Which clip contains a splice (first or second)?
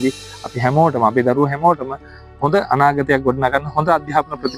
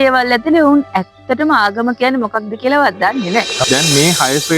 second